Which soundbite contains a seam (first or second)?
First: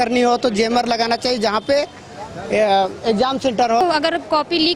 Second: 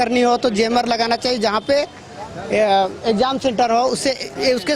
first